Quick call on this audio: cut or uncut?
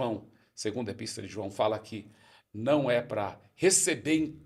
uncut